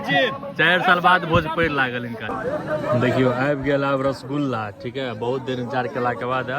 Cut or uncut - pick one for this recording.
cut